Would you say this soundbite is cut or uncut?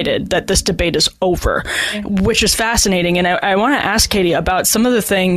uncut